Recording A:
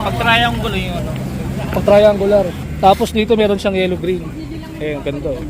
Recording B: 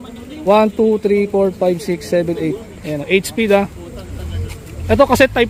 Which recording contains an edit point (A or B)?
A